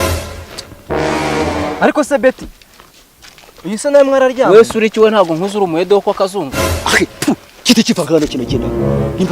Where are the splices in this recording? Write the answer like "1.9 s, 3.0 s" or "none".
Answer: none